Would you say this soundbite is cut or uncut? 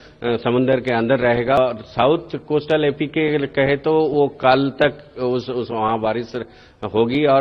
cut